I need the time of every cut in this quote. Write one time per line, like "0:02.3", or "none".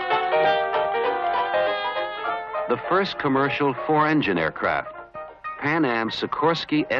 none